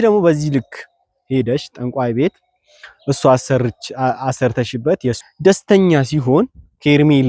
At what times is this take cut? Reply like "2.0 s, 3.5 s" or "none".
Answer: 5.3 s